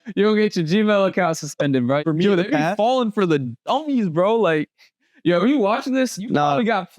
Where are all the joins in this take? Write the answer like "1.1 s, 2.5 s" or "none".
2.0 s

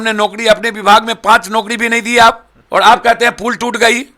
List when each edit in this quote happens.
2.5 s

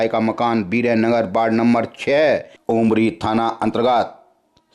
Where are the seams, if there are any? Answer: 2.5 s

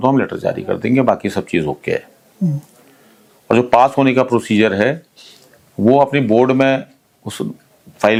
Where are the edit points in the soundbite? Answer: none

